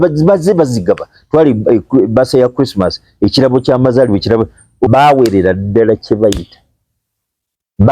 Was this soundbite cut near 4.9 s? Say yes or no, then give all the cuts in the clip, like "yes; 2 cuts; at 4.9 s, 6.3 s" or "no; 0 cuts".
yes; 1 cut; at 4.9 s